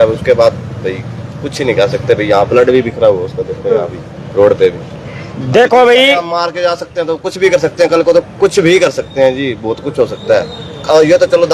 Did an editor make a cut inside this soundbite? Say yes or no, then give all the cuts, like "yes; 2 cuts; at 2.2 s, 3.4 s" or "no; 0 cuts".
no; 0 cuts